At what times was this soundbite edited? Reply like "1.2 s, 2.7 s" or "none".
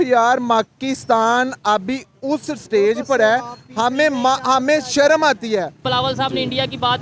5.8 s